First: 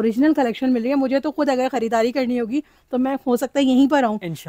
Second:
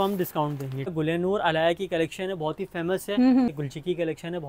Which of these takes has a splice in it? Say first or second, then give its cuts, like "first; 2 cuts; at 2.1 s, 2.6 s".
second; 2 cuts; at 0.9 s, 3.5 s